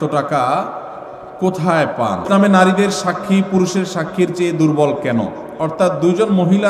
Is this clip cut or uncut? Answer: cut